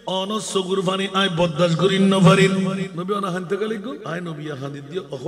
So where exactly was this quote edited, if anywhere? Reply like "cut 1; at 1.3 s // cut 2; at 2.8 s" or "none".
cut 1; at 2.9 s // cut 2; at 4.0 s